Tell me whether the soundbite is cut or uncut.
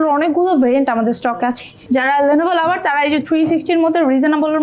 cut